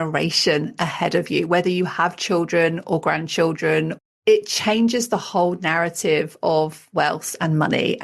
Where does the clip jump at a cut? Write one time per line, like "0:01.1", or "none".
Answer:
0:04.1
0:06.8